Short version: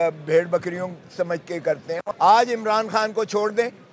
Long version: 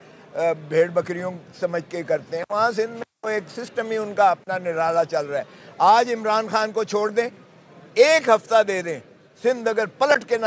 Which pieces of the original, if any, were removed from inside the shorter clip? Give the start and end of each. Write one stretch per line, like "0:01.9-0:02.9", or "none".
0:02.5-0:05.6